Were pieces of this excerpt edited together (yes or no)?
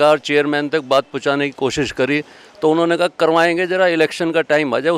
no